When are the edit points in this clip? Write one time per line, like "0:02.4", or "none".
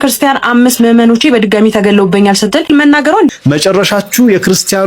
0:03.3